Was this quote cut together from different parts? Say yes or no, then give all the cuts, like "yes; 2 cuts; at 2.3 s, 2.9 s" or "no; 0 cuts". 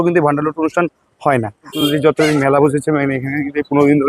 yes; 1 cut; at 1.7 s